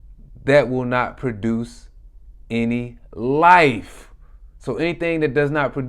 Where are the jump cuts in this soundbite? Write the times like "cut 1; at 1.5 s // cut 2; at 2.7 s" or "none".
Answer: none